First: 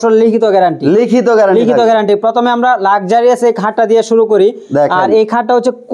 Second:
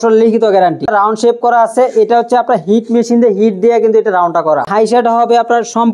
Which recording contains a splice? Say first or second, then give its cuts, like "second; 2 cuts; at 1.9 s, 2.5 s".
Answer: second; 2 cuts; at 0.8 s, 4.7 s